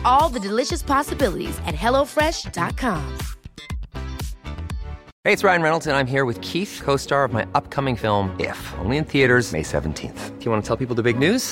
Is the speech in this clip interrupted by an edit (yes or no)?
yes